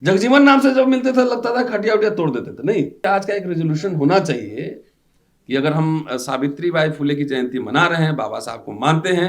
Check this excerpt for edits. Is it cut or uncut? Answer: cut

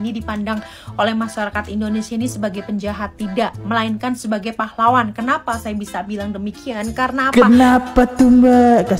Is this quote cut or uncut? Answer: uncut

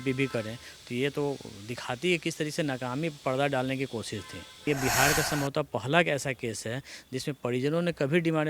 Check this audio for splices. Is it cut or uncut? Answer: cut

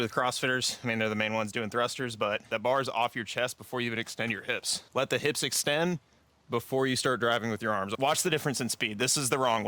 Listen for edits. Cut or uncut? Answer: cut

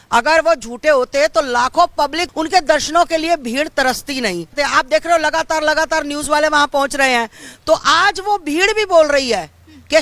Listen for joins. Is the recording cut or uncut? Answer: cut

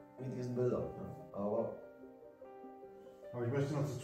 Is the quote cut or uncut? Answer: uncut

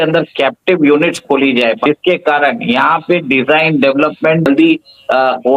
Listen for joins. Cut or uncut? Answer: cut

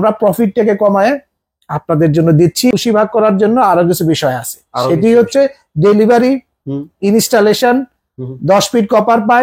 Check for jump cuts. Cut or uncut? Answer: cut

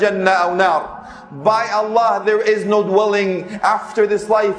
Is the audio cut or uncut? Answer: uncut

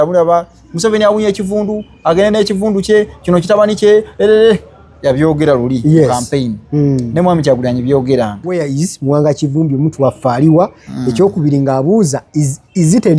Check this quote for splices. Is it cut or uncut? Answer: cut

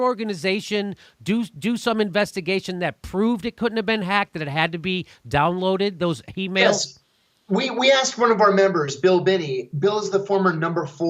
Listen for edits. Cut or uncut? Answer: uncut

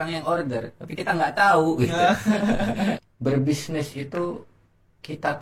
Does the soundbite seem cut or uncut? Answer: cut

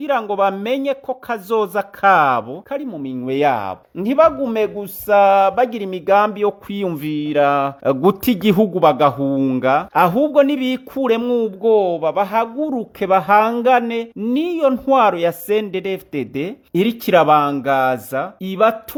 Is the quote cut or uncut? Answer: uncut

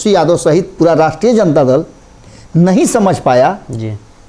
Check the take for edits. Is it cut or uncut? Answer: uncut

